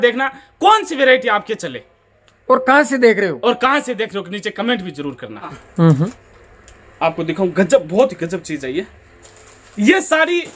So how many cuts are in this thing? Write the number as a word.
one